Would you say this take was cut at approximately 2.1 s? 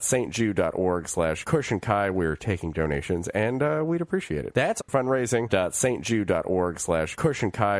yes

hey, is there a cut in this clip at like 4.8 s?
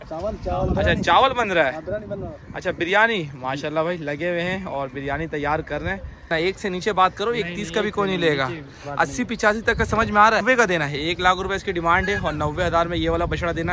no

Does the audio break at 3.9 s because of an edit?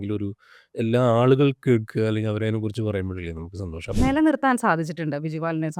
yes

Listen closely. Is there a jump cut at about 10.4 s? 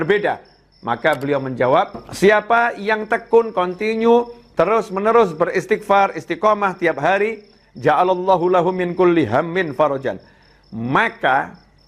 no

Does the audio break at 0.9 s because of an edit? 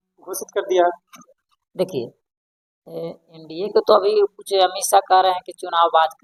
no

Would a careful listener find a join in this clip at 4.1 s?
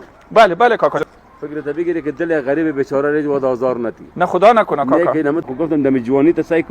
no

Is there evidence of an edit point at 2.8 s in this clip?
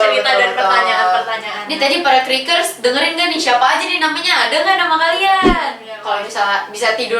no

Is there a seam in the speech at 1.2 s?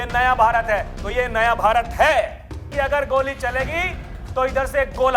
no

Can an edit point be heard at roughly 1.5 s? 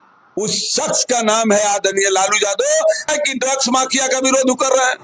no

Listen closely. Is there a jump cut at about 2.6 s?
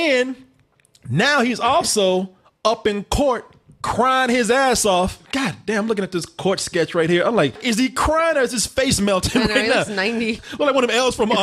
no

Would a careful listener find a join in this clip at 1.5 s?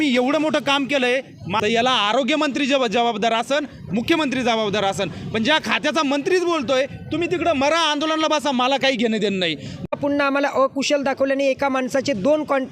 yes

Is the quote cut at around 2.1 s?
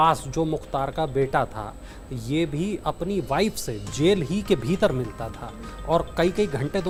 no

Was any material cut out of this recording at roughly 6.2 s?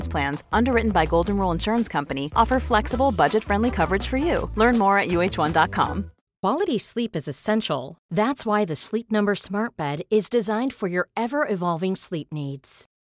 yes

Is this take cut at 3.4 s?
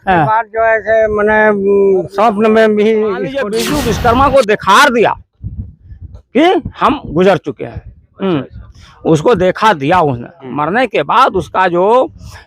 yes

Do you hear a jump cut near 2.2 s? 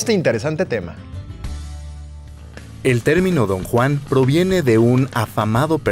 no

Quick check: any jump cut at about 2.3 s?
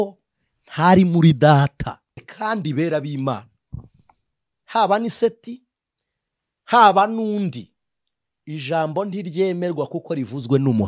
yes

